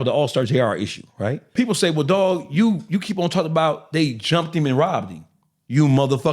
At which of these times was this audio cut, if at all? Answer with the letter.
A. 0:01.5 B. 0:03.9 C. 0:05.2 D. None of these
A